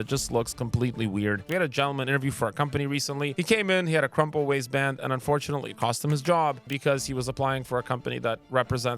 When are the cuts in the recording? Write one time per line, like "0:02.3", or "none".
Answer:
0:01.4
0:03.3
0:06.7